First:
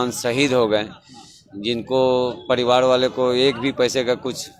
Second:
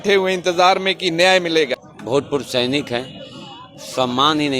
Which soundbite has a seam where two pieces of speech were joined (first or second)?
second